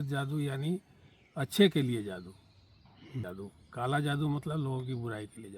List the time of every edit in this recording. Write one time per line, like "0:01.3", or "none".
0:03.3